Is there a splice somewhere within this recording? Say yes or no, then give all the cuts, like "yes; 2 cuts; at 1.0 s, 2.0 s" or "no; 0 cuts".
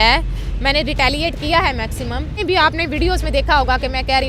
yes; 1 cut; at 2.4 s